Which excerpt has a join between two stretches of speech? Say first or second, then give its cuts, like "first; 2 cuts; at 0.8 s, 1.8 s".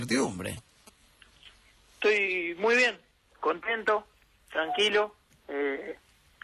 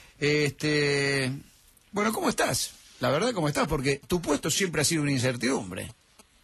second; 1 cut; at 1.2 s